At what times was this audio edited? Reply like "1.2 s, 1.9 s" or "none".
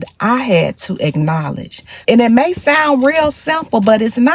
1.9 s